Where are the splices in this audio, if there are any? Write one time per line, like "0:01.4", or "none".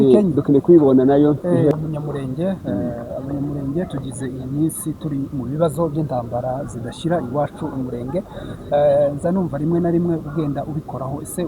0:01.7